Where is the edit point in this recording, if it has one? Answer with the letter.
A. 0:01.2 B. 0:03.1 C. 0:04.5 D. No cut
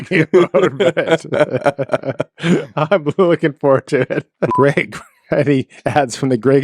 C